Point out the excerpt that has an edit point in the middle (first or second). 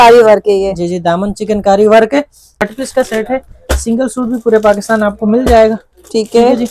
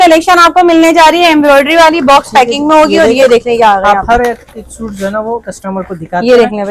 first